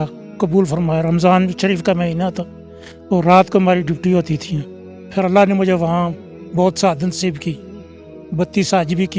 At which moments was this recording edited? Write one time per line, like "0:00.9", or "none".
0:05.0